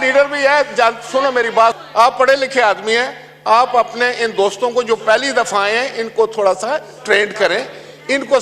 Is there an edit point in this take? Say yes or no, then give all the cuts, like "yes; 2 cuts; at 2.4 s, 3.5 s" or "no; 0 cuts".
yes; 1 cut; at 1.8 s